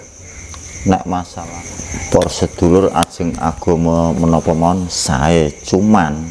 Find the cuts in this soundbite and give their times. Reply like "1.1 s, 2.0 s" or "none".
1.4 s

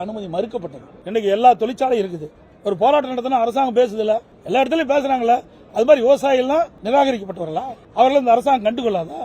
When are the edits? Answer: 0.9 s, 4.3 s, 6.8 s, 7.8 s

